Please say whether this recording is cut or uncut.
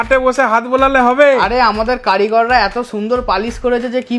uncut